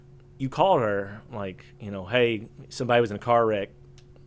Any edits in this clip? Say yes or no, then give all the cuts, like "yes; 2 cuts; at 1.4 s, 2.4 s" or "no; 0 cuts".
no; 0 cuts